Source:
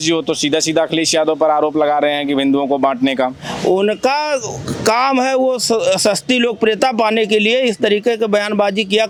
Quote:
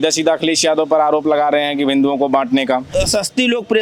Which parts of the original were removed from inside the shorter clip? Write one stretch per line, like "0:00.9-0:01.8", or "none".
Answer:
0:03.4-0:05.8